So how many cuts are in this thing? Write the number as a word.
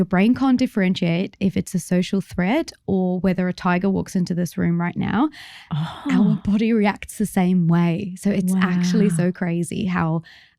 zero